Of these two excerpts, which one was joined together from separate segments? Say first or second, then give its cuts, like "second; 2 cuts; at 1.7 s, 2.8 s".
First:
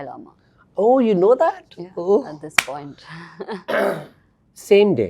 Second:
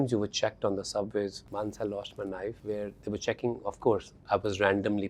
second; 2 cuts; at 1.4 s, 2.6 s